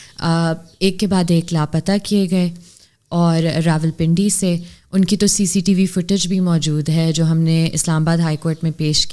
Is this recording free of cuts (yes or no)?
yes